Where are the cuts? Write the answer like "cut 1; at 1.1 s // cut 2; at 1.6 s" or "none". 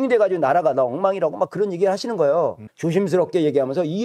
cut 1; at 2.7 s